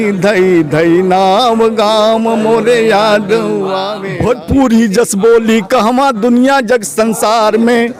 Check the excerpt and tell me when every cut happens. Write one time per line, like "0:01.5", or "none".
0:04.0